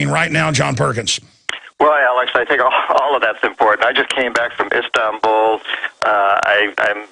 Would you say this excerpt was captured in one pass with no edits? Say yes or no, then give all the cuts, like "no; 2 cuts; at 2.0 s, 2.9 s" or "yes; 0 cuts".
no; 1 cut; at 5.9 s